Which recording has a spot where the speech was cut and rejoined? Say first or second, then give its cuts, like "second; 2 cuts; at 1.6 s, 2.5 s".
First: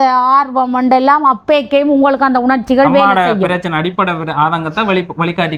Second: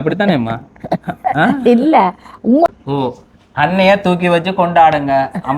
second; 1 cut; at 2.7 s